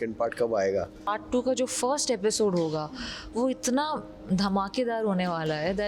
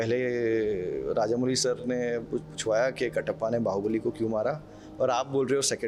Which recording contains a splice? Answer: first; 1 cut; at 1.1 s

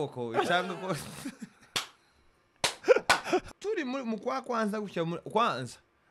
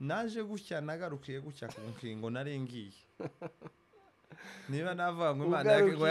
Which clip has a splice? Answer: first; 1 cut; at 3.5 s

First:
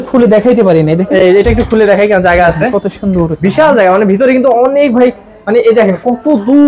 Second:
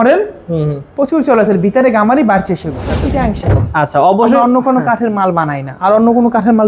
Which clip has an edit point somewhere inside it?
second; 1 cut; at 3.0 s

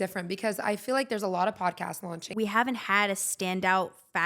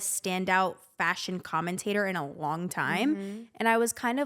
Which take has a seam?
first; 1 cut; at 2.2 s

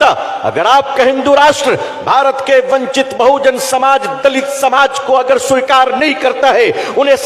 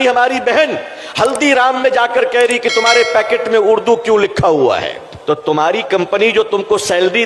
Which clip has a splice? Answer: second; 1 cut; at 5.1 s

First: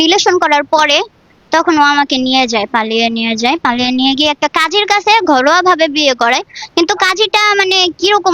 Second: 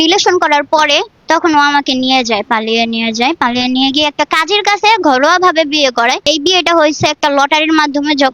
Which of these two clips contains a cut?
second; 2 cuts; at 1.1 s, 6.2 s

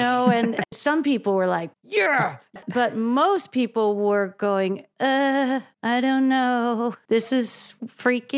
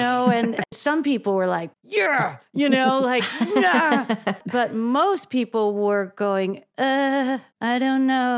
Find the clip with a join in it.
first; 1 cut; at 2.5 s

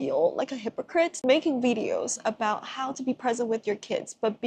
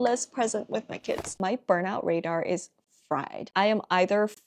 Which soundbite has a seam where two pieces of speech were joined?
second; 2 cuts; at 1.4 s, 3.4 s

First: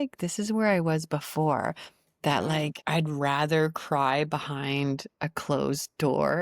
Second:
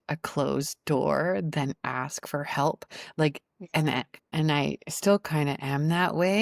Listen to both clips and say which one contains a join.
first; 1 cut; at 2.8 s

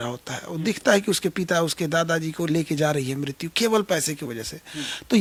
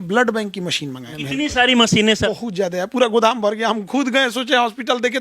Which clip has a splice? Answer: second; 2 cuts; at 1.1 s, 2.3 s

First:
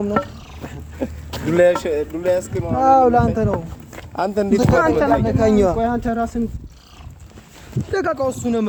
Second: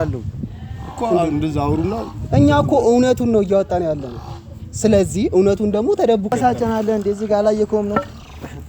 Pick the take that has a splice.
second; 1 cut; at 6.3 s

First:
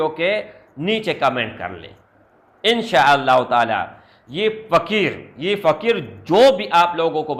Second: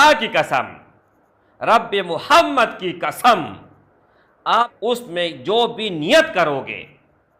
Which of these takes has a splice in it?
second; 1 cut; at 4.6 s

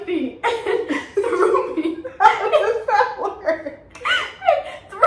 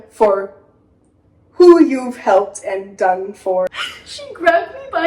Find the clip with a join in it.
second; 1 cut; at 3.7 s

